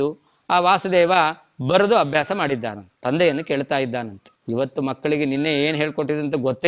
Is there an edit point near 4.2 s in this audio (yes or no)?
no